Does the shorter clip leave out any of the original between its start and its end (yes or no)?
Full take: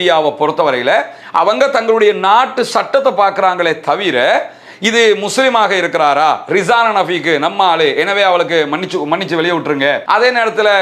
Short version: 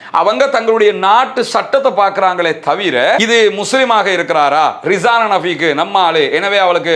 yes